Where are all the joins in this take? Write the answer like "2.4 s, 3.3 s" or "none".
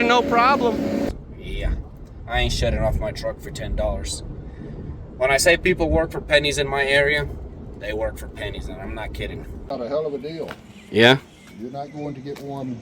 1.1 s, 9.6 s